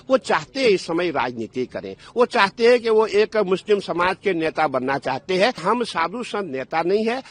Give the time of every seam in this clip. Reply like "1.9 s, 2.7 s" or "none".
5.6 s